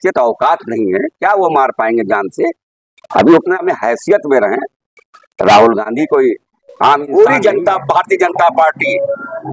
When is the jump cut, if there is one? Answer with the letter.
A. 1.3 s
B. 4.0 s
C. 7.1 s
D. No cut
C